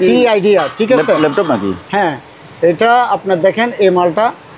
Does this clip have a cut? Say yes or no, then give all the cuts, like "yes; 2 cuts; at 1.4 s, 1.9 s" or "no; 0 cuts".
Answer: no; 0 cuts